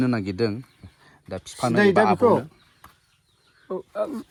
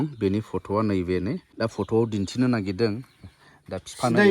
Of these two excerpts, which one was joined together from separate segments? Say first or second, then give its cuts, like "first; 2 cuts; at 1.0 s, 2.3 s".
second; 1 cut; at 1.5 s